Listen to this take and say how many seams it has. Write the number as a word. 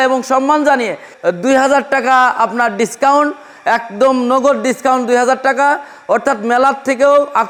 zero